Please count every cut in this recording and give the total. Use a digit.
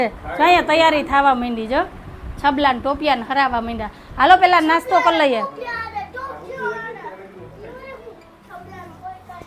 0